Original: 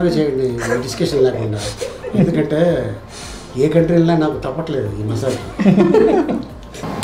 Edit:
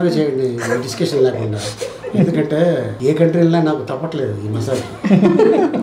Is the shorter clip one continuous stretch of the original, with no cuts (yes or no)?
no